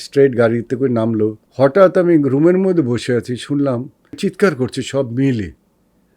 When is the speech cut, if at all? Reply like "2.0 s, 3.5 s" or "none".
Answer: 1.4 s